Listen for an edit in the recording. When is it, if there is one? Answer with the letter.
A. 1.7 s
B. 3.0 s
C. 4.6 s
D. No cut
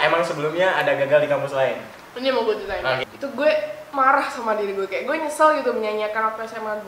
B